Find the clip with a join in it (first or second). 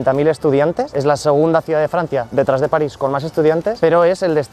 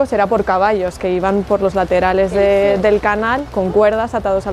first